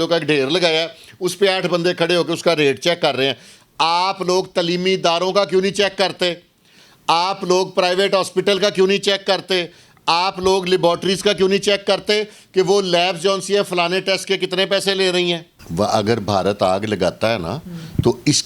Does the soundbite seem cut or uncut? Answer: cut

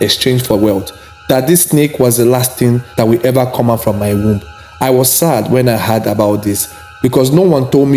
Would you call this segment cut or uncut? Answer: cut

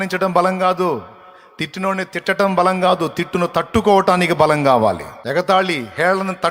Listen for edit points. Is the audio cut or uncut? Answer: cut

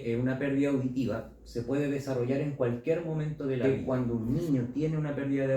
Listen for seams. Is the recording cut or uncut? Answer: cut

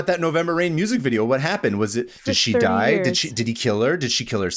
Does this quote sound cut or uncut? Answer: uncut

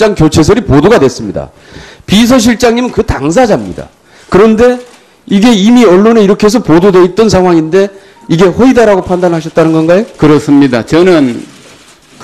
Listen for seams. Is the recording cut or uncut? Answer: cut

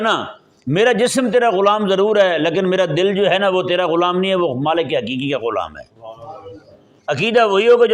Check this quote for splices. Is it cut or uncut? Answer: uncut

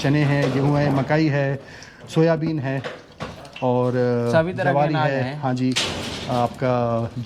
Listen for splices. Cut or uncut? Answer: uncut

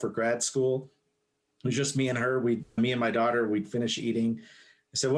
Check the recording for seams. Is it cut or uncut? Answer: cut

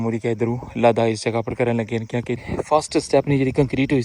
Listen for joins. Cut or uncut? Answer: cut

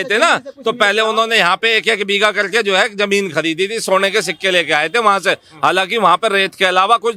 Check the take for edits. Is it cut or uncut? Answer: uncut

